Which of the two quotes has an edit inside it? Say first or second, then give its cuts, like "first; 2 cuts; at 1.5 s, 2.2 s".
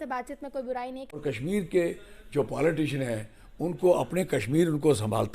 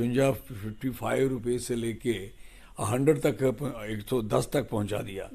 first; 1 cut; at 1.1 s